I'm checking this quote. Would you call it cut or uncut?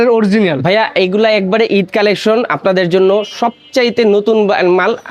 uncut